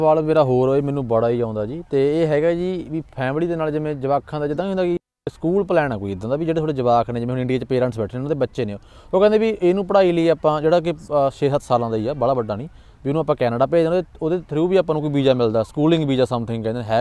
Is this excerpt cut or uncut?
uncut